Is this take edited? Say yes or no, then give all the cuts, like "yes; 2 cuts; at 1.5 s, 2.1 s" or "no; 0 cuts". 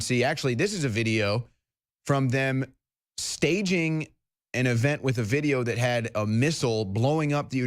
no; 0 cuts